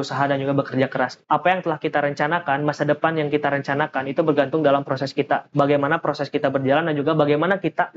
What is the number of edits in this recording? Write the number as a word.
two